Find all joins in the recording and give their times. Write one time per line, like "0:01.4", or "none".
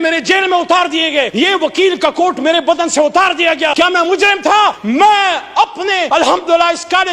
0:01.3
0:03.7
0:04.8
0:06.0